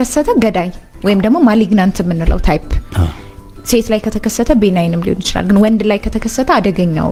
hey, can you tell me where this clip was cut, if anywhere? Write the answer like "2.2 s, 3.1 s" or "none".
none